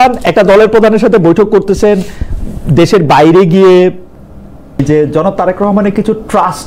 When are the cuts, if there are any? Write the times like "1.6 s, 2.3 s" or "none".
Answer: 4.8 s